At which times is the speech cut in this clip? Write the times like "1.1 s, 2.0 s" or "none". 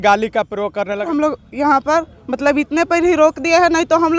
1.1 s